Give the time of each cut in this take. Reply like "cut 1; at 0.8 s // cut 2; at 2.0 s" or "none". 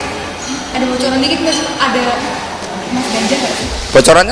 none